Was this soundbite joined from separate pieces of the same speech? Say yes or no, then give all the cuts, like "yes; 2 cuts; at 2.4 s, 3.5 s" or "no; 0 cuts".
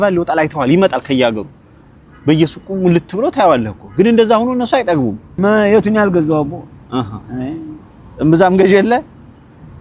yes; 1 cut; at 5.2 s